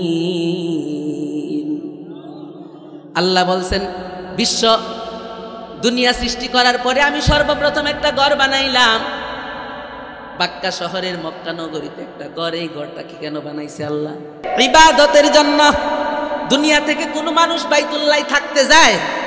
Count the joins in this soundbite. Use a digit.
1